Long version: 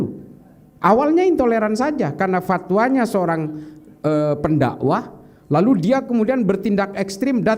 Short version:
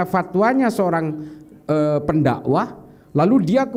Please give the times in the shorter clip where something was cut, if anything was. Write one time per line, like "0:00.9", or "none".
none